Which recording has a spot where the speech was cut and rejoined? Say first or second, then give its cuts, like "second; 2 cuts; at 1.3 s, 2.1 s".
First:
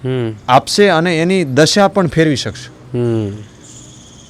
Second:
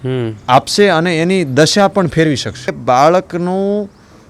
second; 1 cut; at 2.8 s